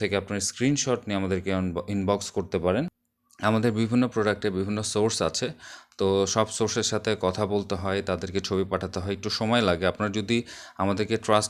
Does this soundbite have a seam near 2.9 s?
yes; 1 cut; at 2.9 s

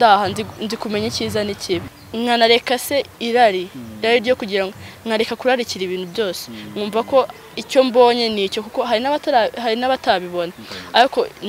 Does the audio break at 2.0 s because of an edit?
yes; 1 cut; at 2.0 s

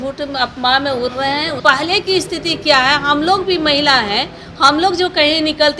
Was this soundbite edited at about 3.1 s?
no; 1 cut; at 1.6 s

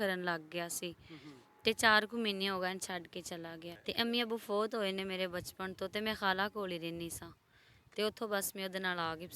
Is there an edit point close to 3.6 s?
yes; 1 cut; at 3.6 s

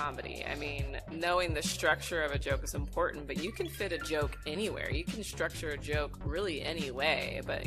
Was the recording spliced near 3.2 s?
no; 1 cut; at 1.0 s

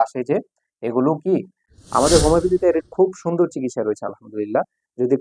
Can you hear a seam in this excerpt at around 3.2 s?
no; 1 cut; at 1.6 s

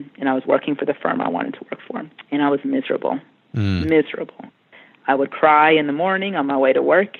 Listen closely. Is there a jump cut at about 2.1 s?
yes; 1 cut; at 2.1 s

